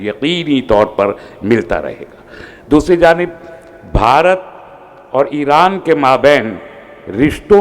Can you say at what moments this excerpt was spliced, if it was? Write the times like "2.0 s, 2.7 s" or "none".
none